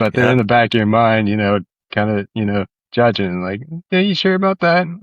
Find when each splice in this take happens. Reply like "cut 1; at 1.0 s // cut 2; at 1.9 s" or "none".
none